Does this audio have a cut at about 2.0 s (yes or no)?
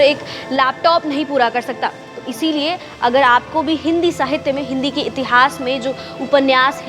no